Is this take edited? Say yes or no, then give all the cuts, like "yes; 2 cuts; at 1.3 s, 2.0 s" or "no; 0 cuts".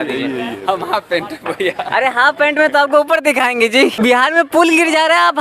yes; 1 cut; at 4.0 s